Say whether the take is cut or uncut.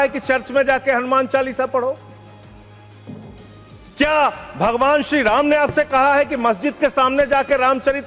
uncut